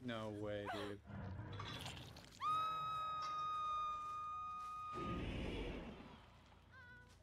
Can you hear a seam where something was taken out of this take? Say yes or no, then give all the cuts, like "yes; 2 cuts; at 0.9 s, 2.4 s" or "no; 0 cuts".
no; 0 cuts